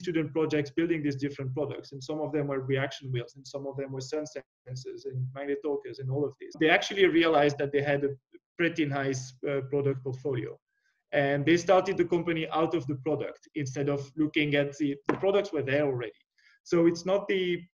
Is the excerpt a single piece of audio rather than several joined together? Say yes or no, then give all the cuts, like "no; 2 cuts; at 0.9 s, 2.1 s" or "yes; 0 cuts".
no; 1 cut; at 6.5 s